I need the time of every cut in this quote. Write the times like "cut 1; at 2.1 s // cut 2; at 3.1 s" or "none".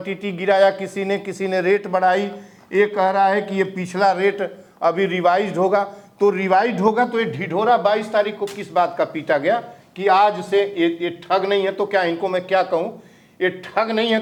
none